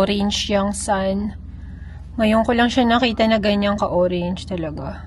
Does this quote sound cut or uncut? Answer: uncut